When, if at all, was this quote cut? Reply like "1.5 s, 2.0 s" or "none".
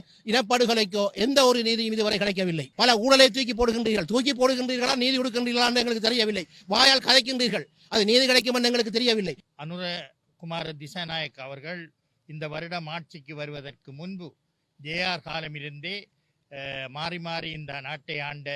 2.6 s, 9.4 s

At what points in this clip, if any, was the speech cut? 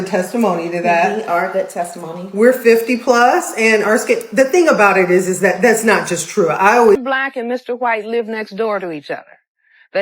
7.0 s

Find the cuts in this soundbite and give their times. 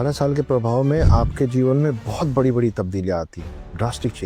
none

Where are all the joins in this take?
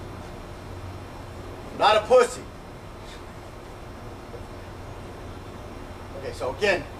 none

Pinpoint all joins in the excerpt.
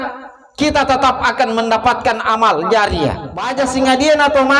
3.5 s

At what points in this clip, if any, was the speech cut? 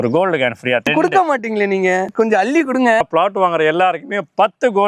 0.9 s, 2.1 s, 3.0 s

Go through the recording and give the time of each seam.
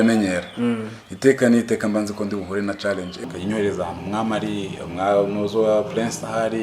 3.2 s

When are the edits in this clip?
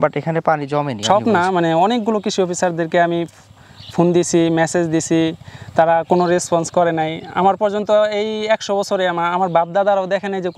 1.0 s

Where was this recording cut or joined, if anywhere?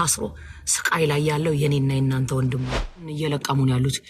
3.1 s

